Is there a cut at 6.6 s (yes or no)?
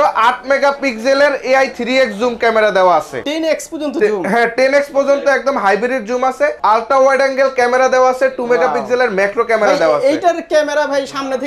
yes